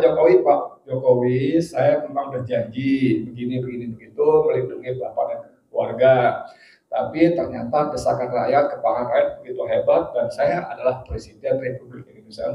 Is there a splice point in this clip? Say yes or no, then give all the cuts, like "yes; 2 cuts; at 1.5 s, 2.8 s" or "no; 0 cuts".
no; 0 cuts